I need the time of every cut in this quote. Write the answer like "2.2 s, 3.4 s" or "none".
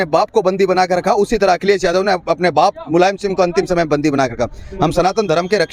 none